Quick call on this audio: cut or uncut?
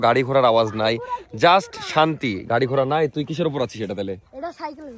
uncut